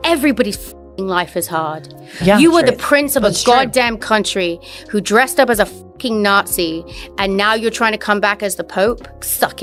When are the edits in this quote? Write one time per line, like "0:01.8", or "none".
none

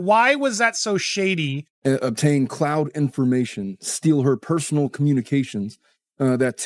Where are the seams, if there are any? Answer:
0:01.7

